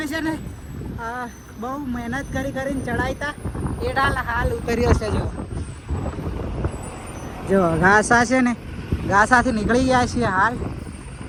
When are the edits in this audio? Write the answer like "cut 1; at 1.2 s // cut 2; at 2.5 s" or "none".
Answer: none